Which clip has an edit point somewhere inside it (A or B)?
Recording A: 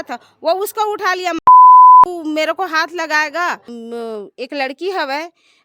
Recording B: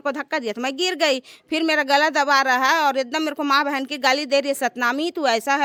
A